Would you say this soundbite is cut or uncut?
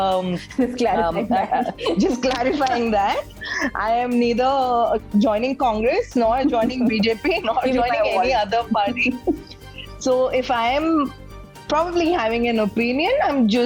uncut